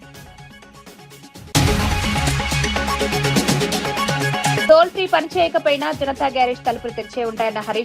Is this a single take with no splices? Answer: no; 1 cut; at 1.2 s

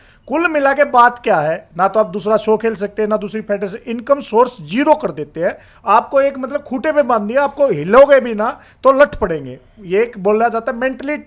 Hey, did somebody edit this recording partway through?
no; 0 cuts

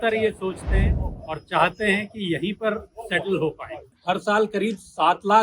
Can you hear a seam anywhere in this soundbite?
yes; 1 cut; at 3.9 s

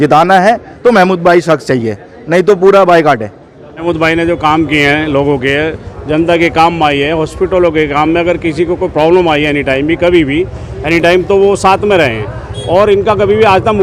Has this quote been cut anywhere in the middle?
no; 0 cuts

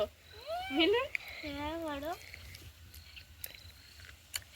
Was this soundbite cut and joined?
no; 0 cuts

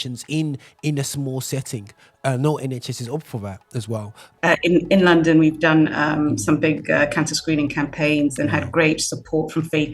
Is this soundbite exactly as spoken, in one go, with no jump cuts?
no; 1 cut; at 4.1 s

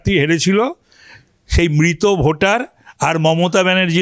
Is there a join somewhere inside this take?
no; 0 cuts

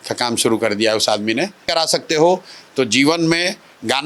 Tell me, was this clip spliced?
yes; 1 cut; at 1.7 s

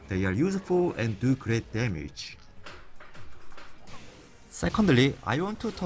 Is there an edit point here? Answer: no; 0 cuts

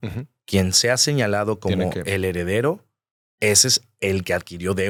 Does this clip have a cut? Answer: no; 0 cuts

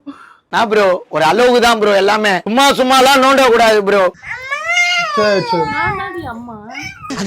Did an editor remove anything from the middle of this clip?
yes; 1 cut; at 4.3 s

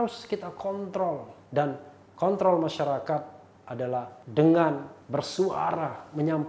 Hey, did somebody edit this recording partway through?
yes; 3 cuts; at 1.5 s, 3.8 s, 4.9 s

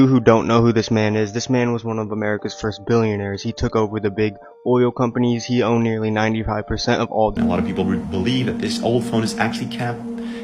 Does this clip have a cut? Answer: yes; 1 cut; at 7.3 s

